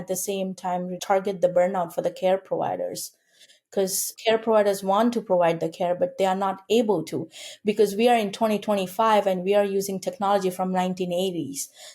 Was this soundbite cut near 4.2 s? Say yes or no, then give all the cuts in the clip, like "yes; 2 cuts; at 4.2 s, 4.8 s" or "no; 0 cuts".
no; 1 cut; at 1.0 s